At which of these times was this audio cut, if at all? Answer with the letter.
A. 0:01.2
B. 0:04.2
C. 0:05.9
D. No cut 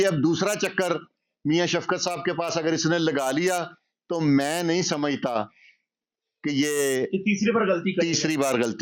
D